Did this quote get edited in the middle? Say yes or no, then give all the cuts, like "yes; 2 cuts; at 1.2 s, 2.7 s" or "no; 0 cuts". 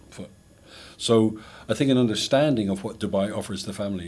no; 0 cuts